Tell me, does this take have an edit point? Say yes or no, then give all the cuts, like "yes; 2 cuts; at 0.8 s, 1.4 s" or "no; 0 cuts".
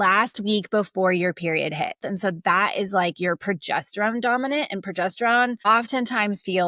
yes; 1 cut; at 2.0 s